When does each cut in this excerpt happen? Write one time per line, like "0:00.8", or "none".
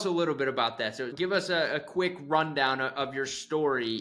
0:01.1